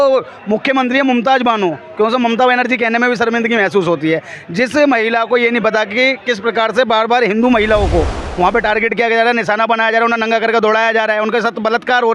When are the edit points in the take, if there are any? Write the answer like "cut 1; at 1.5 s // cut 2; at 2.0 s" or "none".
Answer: none